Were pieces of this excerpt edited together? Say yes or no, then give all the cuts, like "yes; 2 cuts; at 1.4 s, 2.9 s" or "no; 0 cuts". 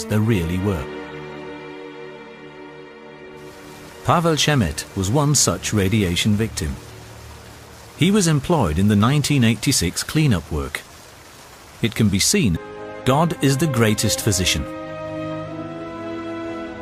no; 0 cuts